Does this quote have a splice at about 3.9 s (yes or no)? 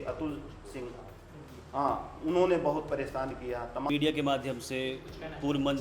yes